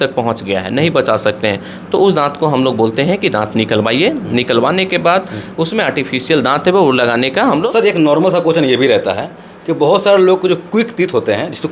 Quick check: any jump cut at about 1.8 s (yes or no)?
no